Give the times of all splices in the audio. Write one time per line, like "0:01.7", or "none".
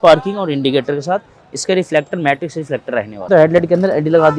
0:03.2